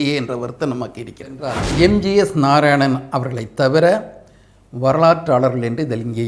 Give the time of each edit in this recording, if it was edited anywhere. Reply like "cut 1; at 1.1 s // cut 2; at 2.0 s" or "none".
cut 1; at 1.6 s